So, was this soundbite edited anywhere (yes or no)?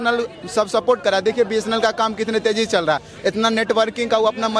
no